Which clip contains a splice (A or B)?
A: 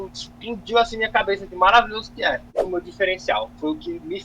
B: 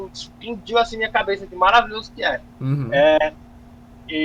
A